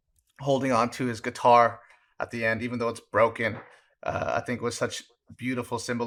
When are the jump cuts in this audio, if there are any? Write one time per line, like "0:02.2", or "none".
none